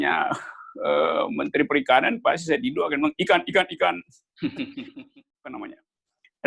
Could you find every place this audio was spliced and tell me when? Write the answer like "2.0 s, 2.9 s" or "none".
4.8 s